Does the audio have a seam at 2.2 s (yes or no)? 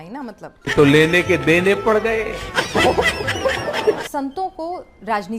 no